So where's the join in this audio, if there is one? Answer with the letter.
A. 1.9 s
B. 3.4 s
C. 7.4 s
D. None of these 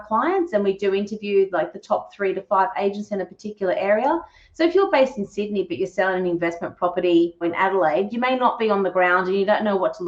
C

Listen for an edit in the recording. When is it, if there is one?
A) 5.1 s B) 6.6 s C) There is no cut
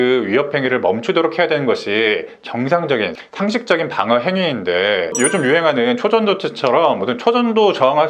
A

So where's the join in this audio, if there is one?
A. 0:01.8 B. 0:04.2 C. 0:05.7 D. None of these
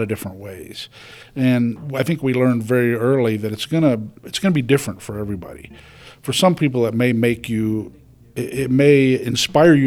A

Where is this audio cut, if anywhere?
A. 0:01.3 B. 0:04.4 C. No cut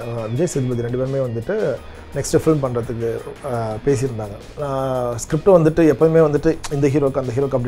B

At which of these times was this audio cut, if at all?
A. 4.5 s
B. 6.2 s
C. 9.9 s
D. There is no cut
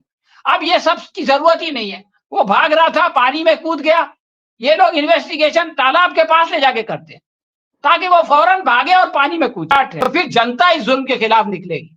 C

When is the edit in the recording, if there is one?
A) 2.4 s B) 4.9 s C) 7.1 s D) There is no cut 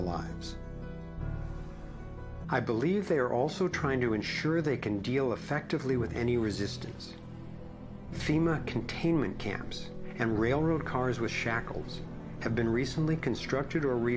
A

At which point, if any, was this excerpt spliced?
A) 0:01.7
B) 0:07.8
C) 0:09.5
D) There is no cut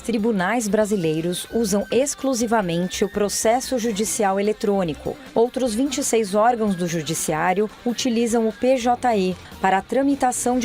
C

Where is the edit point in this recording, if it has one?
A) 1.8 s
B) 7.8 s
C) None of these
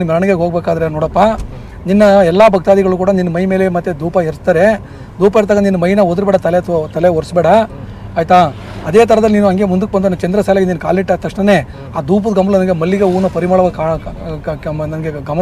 C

